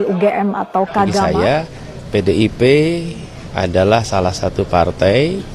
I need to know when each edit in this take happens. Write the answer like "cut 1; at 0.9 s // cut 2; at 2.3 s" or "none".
cut 1; at 1.2 s